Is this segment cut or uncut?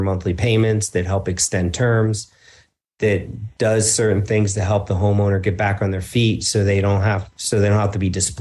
uncut